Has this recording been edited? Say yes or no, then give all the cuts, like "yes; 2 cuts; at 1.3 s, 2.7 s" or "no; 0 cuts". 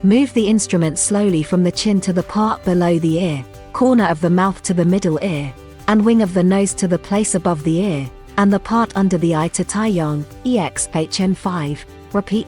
no; 0 cuts